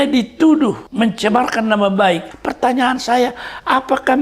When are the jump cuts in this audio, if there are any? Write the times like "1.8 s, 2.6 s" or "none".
0.8 s, 2.3 s